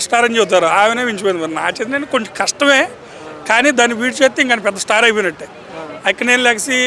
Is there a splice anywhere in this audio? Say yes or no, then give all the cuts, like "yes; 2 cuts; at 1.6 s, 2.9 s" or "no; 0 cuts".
no; 0 cuts